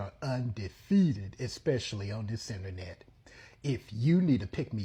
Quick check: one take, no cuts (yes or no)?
yes